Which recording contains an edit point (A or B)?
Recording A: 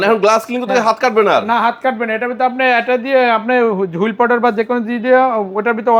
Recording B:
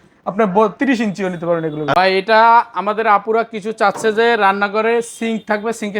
B